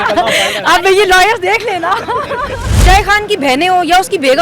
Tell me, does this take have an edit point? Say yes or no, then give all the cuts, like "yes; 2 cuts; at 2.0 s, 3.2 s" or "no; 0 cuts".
yes; 1 cut; at 2.7 s